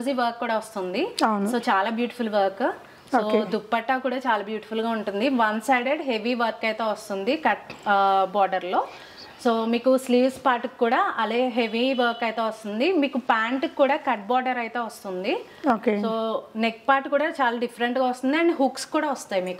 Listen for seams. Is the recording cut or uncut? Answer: uncut